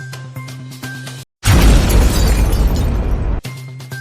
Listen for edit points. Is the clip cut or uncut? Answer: cut